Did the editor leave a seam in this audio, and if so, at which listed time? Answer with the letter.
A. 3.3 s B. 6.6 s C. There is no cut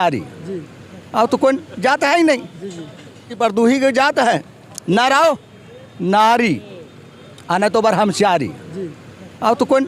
A